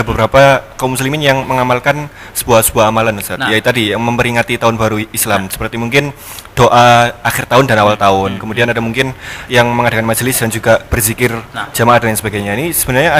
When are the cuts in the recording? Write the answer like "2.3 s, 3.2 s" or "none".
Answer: none